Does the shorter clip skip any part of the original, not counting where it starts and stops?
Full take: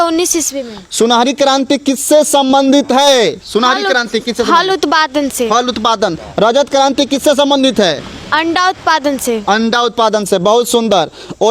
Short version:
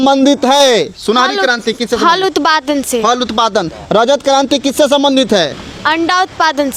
no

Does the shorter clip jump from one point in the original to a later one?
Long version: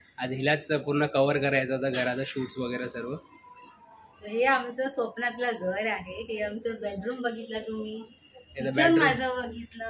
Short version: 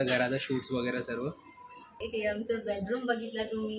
yes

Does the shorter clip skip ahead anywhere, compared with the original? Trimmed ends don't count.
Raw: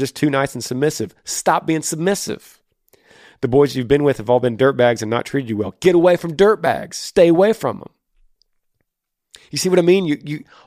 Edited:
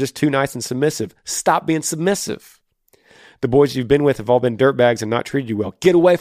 no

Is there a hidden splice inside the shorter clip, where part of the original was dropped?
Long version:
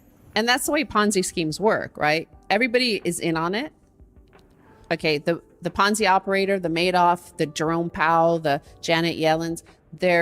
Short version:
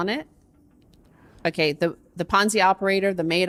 no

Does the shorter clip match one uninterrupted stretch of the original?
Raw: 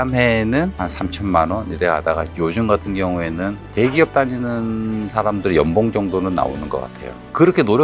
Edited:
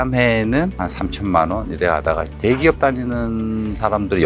no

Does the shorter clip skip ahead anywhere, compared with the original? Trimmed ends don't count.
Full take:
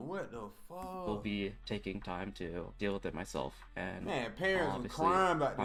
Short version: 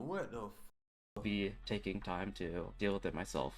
no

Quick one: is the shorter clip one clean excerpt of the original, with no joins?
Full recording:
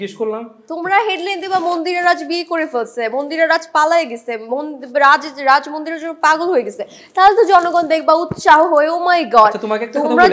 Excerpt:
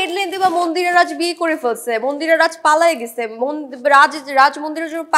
yes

